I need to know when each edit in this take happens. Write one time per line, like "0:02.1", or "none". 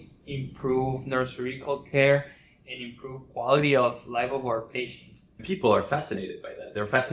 0:05.4